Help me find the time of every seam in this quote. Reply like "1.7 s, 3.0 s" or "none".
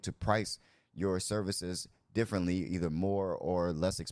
none